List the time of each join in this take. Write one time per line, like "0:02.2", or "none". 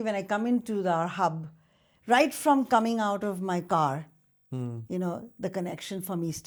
none